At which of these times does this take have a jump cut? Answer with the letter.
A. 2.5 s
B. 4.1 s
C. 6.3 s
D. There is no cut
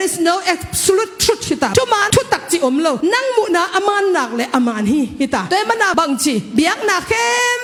D